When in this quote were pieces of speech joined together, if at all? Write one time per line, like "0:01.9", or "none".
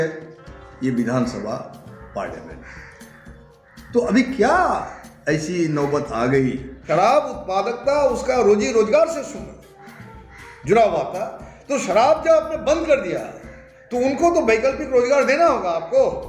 0:06.9

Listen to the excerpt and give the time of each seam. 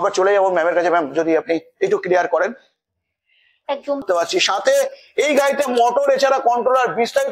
0:04.0

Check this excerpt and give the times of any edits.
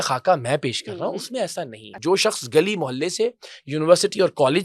0:01.8

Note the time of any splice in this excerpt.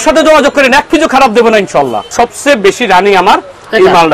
0:02.0

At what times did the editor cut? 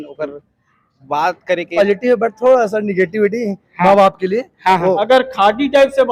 0:01.7
0:05.0

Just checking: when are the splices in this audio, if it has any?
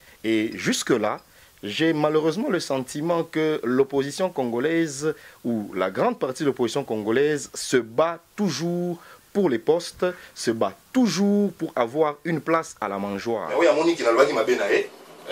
0:13.5

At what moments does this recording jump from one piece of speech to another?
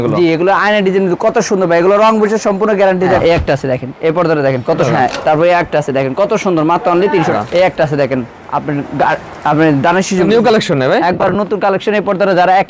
0:03.2
0:04.8
0:07.3
0:10.3

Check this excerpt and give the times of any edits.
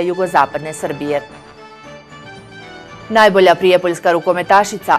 0:01.5
0:03.0

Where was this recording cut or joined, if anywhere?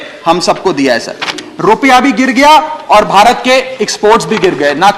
0:01.4

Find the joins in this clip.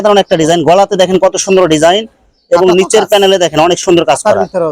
none

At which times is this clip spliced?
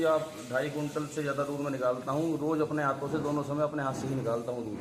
none

